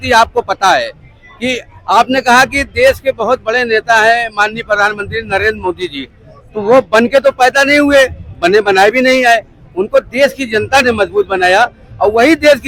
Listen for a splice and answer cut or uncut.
uncut